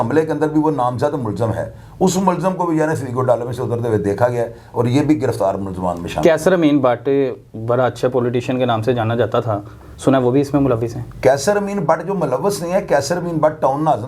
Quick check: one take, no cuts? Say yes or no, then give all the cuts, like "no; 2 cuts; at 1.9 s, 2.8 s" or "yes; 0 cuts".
yes; 0 cuts